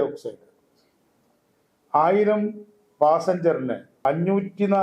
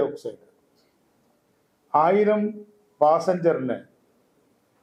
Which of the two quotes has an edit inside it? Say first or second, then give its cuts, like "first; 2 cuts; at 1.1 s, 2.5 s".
first; 1 cut; at 3.9 s